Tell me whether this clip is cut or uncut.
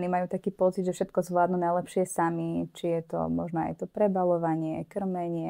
uncut